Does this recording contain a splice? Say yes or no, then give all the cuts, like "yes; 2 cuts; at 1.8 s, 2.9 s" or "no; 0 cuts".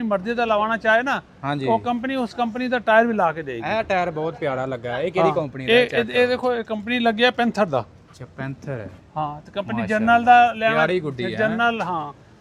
no; 0 cuts